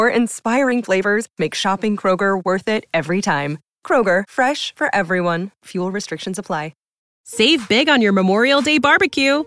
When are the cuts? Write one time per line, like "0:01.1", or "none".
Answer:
0:07.2